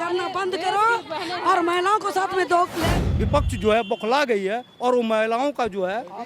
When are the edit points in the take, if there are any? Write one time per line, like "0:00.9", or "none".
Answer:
0:03.0